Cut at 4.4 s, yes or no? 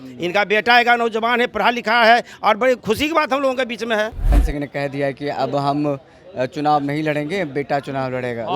yes